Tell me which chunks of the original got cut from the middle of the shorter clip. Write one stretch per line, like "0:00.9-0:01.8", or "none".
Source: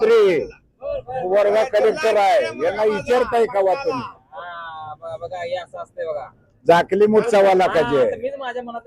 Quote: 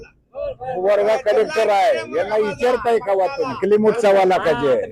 0:04.1-0:06.9

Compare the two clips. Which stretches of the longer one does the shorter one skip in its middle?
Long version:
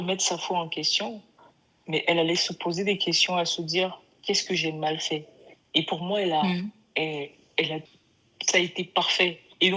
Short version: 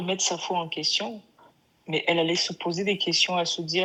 none

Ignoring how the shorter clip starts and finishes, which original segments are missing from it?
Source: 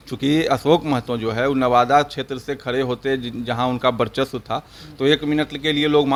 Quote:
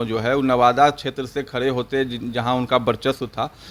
none

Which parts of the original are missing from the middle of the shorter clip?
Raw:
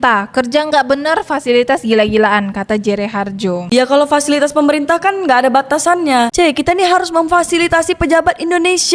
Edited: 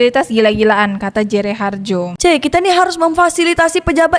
0:03.7-0:06.3

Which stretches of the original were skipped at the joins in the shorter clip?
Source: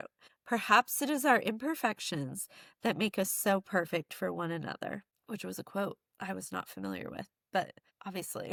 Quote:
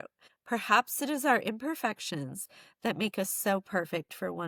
none

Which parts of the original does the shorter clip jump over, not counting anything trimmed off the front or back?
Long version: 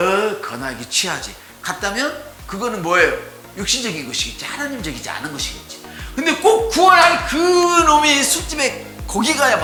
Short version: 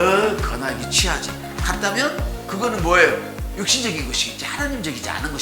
none

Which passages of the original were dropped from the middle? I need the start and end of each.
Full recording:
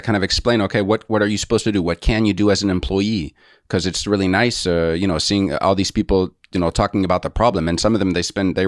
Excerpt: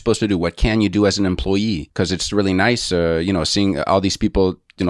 0:03.3-0:03.6

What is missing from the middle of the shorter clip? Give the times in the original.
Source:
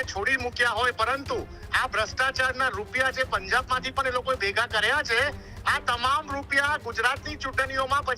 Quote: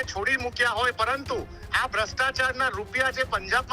none

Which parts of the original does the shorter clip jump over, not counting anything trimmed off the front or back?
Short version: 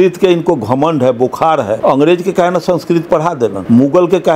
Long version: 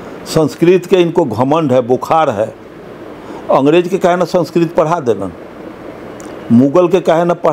0:02.5-0:03.4
0:05.2-0:06.4

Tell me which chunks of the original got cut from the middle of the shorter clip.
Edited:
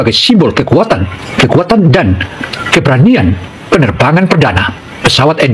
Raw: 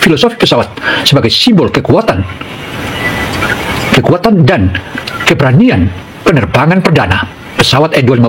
0:02.4-0:03.8

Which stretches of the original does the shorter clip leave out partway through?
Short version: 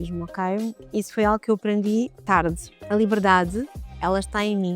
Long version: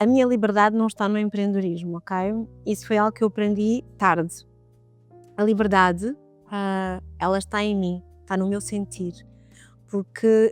0:04.4-0:05.2
0:06.3-0:07.0

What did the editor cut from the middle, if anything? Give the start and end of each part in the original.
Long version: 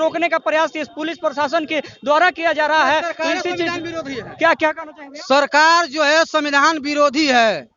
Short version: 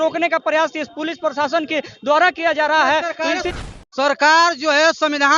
0:03.5-0:04.8

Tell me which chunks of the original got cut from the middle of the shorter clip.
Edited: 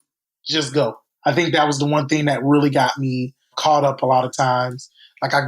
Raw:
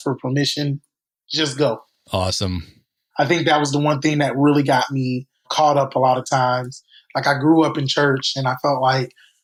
0:01.9-0:03.0

